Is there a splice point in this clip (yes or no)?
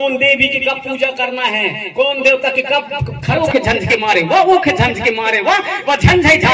yes